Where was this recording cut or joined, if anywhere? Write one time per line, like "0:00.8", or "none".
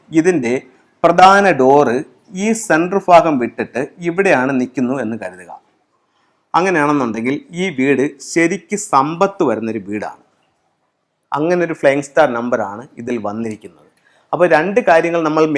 none